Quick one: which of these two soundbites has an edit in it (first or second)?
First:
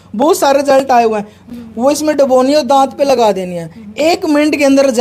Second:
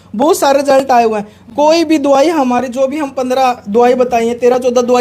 first